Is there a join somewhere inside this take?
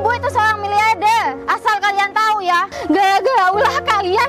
yes; 2 cuts; at 1.4 s, 2.7 s

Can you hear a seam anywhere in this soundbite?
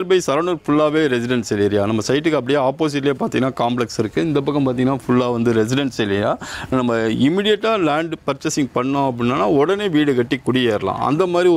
no; 0 cuts

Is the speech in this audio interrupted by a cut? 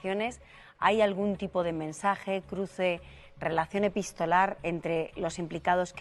no; 0 cuts

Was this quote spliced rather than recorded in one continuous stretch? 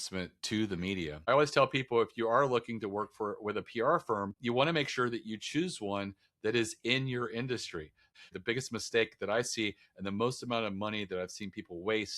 yes; 3 cuts; at 1.3 s, 4.4 s, 8.3 s

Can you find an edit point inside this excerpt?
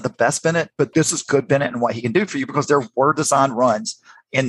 yes; 1 cut; at 0.9 s

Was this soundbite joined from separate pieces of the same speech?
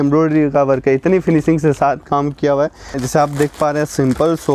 yes; 1 cut; at 3.0 s

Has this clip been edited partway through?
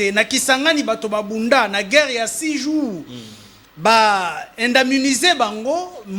no; 0 cuts

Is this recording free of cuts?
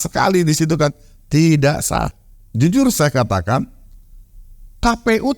no; 1 cut; at 2.1 s

